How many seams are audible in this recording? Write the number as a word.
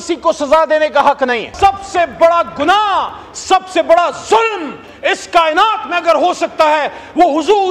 one